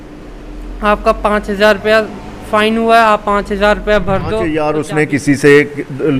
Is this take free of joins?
no; 1 cut; at 4.5 s

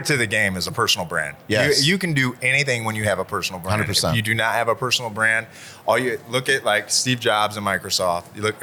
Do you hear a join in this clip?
no; 0 cuts

